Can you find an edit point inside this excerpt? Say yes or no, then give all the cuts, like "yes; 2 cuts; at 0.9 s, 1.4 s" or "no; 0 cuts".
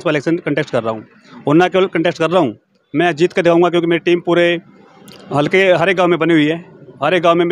no; 0 cuts